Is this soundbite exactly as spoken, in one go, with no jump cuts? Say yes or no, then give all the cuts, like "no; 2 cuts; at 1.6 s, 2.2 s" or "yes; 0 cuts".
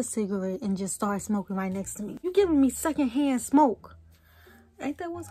no; 1 cut; at 2.3 s